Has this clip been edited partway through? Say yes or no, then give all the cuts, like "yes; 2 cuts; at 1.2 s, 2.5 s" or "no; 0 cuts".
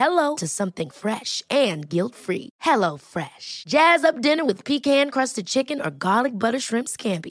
no; 0 cuts